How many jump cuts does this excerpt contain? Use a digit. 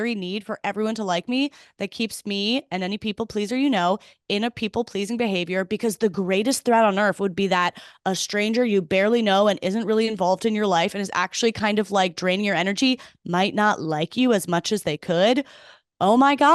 0